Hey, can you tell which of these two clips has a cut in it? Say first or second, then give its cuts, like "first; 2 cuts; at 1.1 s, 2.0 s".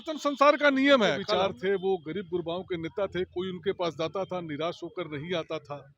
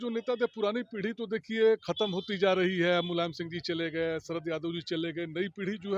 first; 1 cut; at 1.2 s